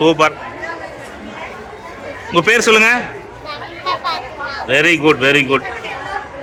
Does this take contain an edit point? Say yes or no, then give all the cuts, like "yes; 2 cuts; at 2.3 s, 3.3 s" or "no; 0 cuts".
no; 0 cuts